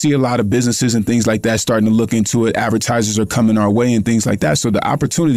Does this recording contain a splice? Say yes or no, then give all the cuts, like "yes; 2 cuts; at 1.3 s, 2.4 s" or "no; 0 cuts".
no; 0 cuts